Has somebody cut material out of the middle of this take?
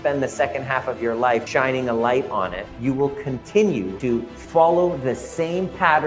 yes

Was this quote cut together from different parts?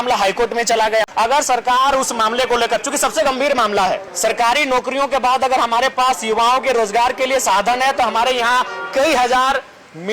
yes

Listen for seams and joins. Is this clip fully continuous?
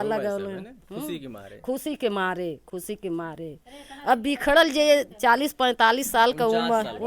yes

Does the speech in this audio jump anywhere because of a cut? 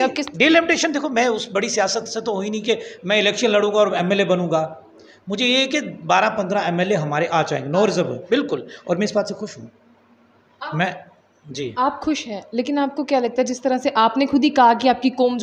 no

